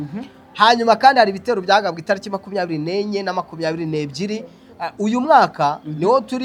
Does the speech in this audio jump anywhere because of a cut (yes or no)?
no